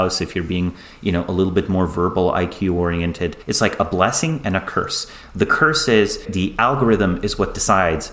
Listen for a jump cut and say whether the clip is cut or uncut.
cut